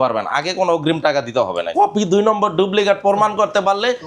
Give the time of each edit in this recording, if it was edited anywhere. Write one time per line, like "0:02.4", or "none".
0:01.7